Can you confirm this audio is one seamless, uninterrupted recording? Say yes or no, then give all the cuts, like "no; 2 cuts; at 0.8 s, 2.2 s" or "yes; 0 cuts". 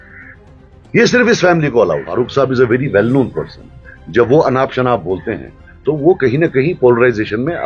no; 1 cut; at 2.1 s